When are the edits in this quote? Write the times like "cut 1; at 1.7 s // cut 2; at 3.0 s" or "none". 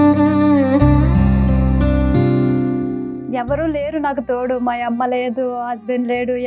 cut 1; at 3.3 s

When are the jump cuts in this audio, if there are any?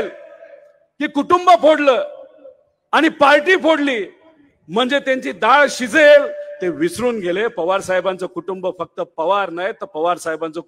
none

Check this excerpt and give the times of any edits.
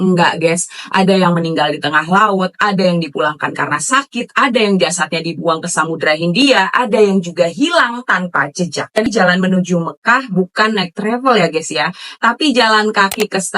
cut 1; at 9.1 s

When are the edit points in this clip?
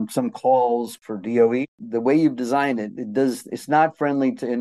cut 1; at 0.9 s // cut 2; at 1.8 s

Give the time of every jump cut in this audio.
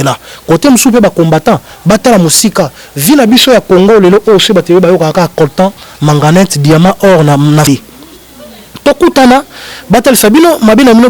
cut 1; at 7.7 s

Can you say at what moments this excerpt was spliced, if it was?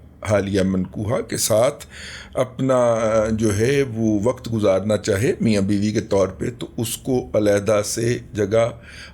none

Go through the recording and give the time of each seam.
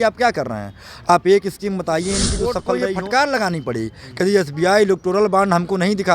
cut 1; at 2.6 s

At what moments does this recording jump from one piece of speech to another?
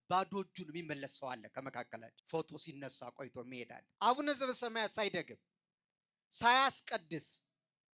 cut 1; at 2.1 s // cut 2; at 3.8 s

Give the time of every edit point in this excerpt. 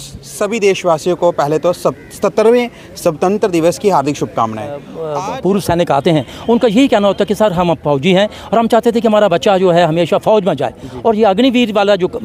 cut 1; at 5.0 s

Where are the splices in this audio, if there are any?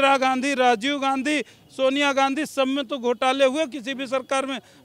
none

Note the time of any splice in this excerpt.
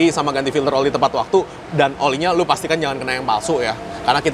none

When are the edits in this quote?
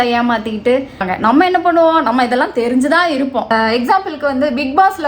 cut 1; at 1.0 s // cut 2; at 3.5 s

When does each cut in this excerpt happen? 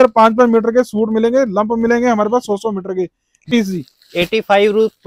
cut 1; at 3.5 s

